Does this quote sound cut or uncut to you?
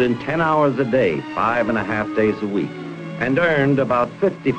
uncut